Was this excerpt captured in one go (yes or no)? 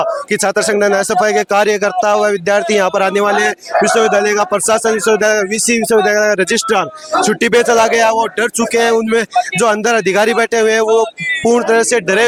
yes